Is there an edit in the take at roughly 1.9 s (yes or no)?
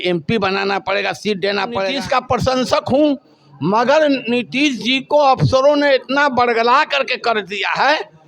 yes